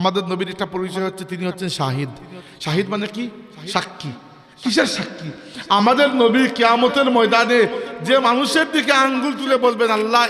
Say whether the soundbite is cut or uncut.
uncut